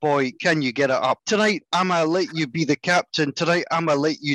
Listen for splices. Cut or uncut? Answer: cut